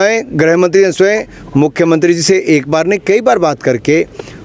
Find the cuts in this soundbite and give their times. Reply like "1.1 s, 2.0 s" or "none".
none